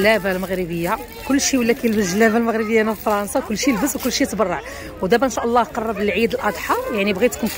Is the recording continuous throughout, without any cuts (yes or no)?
yes